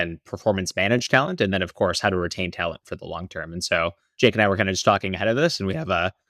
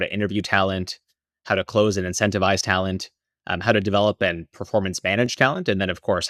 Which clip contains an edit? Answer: first; 1 cut; at 4.1 s

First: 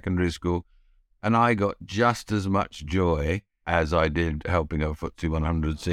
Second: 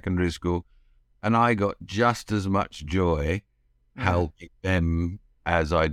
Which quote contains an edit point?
first; 1 cut; at 3.5 s

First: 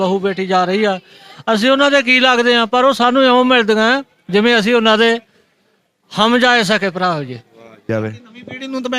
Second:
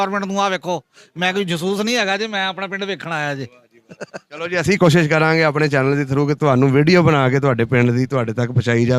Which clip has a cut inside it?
first; 1 cut; at 7.9 s

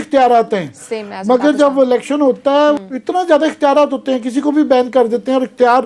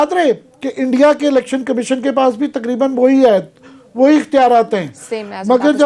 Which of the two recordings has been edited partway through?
first; 1 cut; at 2.8 s

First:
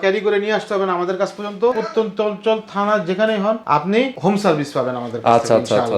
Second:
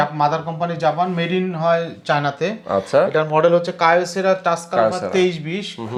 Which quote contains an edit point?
first; 2 cuts; at 1.7 s, 4.0 s

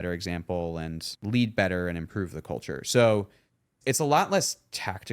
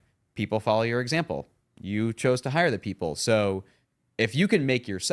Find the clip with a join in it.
first; 2 cuts; at 1.1 s, 3.7 s

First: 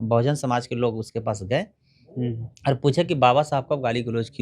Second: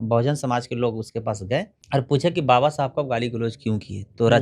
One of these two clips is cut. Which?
second; 1 cut; at 1.8 s

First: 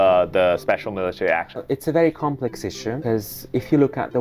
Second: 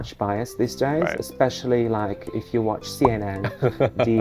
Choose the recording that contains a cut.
first; 2 cuts; at 1.6 s, 2.9 s

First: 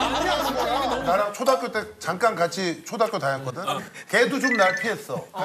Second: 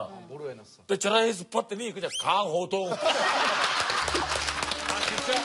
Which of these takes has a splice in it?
first; 1 cut; at 1.0 s

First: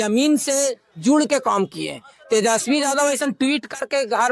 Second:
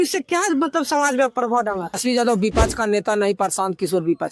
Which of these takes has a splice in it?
second; 1 cut; at 2.0 s

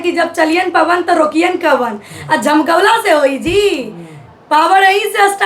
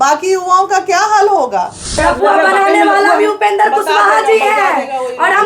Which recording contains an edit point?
second; 1 cut; at 2.0 s

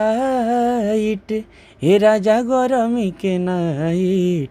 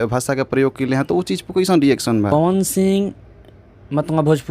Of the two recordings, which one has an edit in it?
second; 1 cut; at 2.3 s

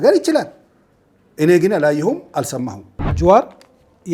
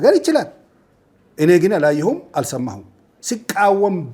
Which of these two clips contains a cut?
first; 1 cut; at 3.1 s

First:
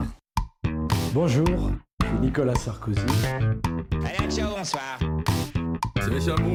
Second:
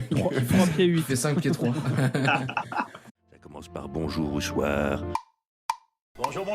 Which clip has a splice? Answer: second; 1 cut; at 3.6 s

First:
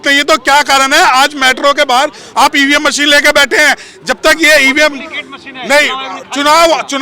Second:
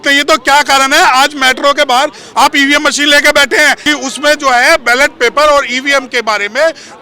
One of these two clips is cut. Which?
second; 1 cut; at 3.8 s

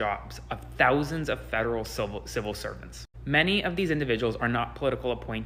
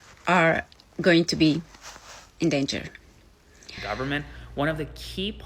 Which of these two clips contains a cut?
second; 1 cut; at 3.7 s

